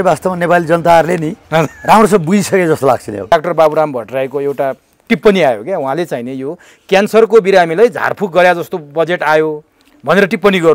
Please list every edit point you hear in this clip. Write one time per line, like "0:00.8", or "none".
0:03.3